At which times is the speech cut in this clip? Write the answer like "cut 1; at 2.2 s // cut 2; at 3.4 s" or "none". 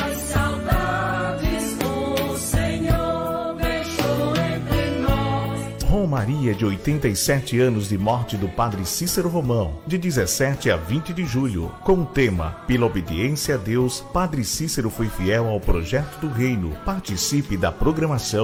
none